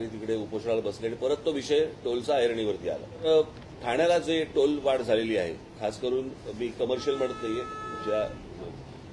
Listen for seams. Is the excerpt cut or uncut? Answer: cut